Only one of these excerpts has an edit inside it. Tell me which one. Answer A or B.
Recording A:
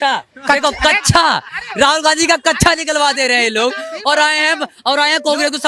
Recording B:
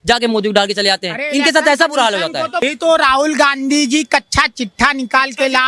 B